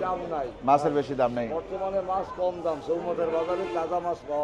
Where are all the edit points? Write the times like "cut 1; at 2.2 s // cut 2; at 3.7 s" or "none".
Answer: none